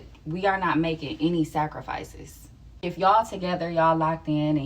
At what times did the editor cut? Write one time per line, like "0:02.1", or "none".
0:03.1